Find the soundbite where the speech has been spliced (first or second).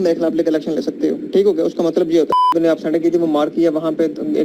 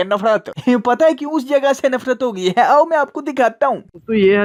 first